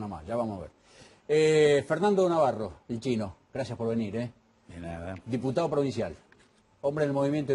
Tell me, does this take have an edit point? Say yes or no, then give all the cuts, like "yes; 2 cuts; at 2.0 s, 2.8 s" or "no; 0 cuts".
yes; 1 cut; at 2.0 s